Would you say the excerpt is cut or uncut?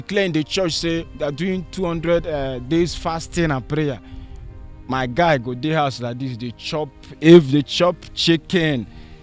uncut